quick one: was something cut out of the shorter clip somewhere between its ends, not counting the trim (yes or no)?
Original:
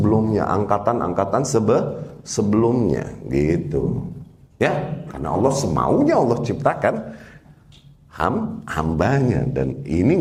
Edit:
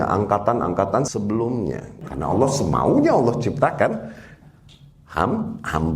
yes